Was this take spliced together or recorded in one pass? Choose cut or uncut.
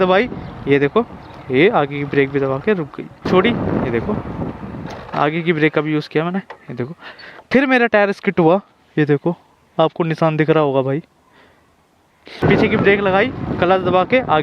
cut